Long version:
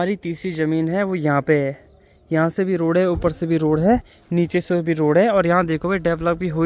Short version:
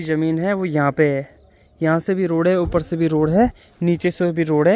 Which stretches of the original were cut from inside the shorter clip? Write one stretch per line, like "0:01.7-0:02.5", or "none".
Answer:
none